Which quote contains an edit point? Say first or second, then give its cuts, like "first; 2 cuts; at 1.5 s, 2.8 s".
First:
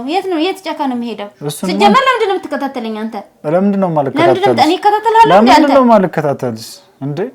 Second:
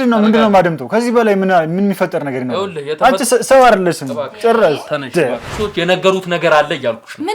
second; 1 cut; at 5.5 s